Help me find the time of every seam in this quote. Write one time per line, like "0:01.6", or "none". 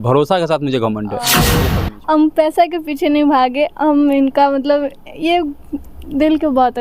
0:01.6